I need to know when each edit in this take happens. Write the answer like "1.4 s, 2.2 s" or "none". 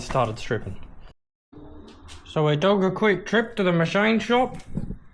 1.1 s